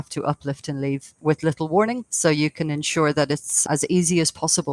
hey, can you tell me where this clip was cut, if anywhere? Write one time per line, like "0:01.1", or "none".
0:01.1
0:02.1
0:03.6

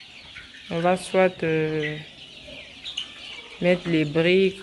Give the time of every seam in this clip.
none

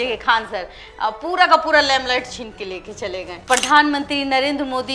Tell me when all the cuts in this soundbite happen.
0:03.4

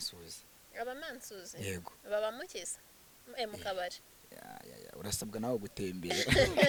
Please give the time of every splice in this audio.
none

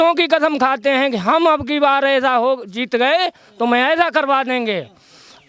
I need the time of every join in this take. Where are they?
none

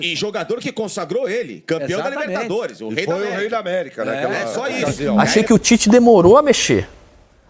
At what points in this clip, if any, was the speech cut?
0:05.0

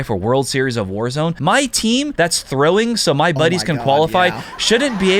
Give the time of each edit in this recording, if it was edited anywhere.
0:01.4
0:02.1

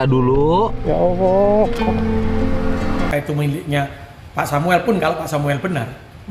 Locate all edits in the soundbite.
0:03.1

